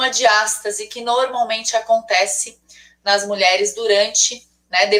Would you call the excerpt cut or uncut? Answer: uncut